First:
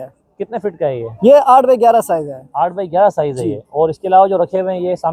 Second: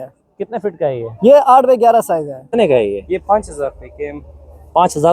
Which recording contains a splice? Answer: second; 1 cut; at 2.4 s

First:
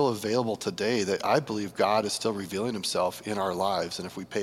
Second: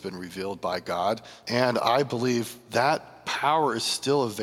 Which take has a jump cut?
second; 3 cuts; at 1.3 s, 2.6 s, 3.2 s

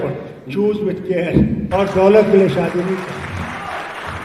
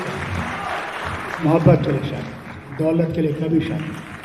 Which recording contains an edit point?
first; 1 cut; at 1.7 s

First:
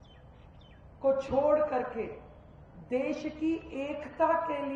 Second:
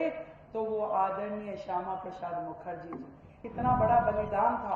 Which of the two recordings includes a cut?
second; 1 cut; at 3.4 s

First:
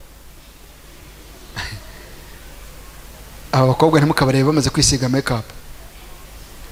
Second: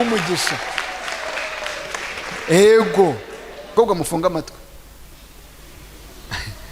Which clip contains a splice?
second; 1 cut; at 3.7 s

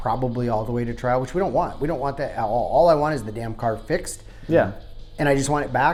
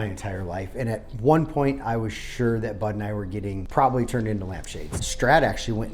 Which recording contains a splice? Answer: second; 2 cuts; at 3.6 s, 5.0 s

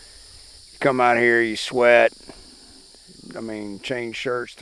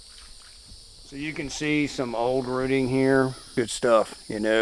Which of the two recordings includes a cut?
second; 1 cut; at 3.4 s

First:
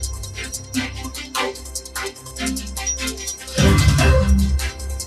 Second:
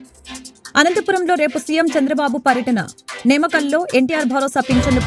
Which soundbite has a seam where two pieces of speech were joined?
first; 1 cut; at 1.0 s

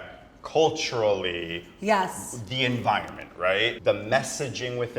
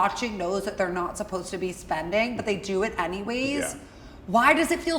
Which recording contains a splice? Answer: first; 1 cut; at 3.8 s

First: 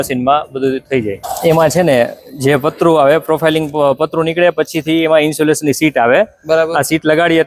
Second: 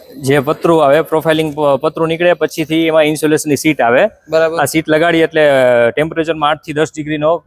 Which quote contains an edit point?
first; 1 cut; at 1.2 s

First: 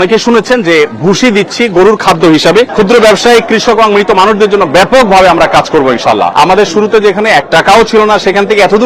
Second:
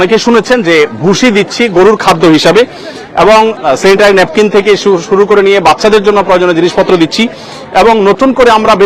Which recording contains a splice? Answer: first; 2 cuts; at 2.7 s, 6.3 s

